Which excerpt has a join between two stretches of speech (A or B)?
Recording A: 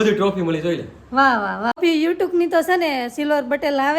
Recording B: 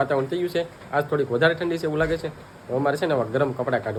A